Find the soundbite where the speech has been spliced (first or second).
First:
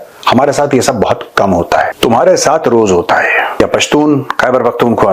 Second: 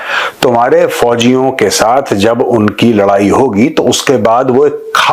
first